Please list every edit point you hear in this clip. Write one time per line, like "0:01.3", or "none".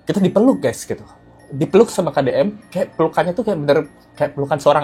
none